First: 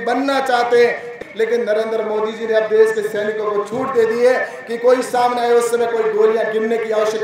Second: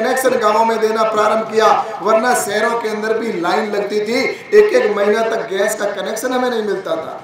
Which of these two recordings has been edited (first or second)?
first